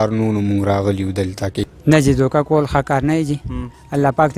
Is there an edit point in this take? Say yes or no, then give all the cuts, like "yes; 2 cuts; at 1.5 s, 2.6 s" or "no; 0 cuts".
yes; 1 cut; at 1.7 s